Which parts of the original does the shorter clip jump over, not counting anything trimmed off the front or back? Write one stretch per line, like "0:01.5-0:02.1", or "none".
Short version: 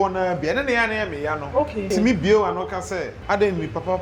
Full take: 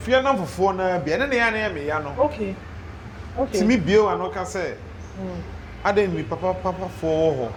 0:02.5-0:03.5
0:04.8-0:05.7

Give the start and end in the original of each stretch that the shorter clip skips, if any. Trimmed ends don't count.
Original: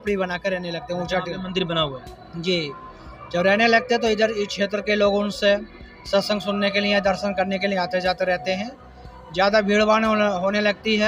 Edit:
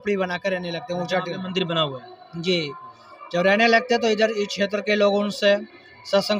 none

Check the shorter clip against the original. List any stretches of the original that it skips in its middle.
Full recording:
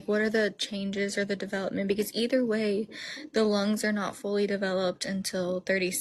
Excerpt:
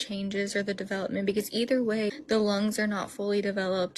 0:02.7-0:03.2

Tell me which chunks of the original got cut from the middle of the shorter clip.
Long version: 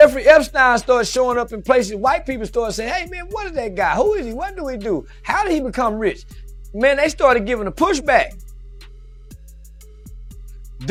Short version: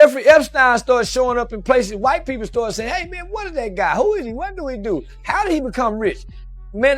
none

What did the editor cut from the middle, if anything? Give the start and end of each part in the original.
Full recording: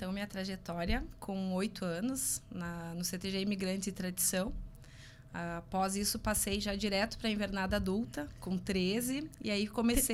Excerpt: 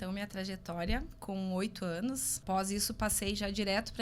0:02.4-0:05.6

